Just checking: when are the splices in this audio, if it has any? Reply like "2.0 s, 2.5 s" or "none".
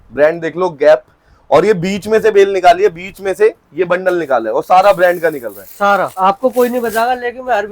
6.1 s